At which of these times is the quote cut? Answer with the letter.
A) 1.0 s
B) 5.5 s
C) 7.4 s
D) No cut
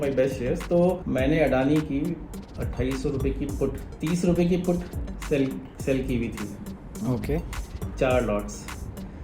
A